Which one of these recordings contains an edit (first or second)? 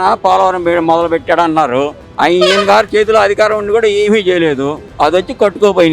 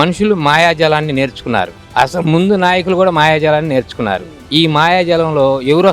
first